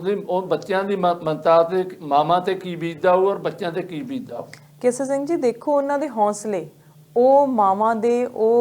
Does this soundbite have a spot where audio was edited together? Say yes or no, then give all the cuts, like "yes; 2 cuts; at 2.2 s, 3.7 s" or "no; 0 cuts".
no; 0 cuts